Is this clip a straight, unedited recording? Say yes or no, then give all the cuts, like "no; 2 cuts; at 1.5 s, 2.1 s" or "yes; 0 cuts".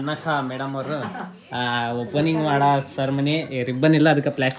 yes; 0 cuts